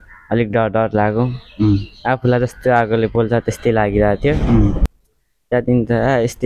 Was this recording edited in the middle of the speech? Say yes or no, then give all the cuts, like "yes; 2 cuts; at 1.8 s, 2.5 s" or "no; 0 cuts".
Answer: yes; 1 cut; at 4.9 s